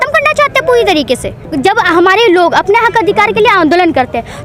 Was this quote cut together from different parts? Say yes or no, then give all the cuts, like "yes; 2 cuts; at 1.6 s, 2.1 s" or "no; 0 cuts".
yes; 1 cut; at 1.5 s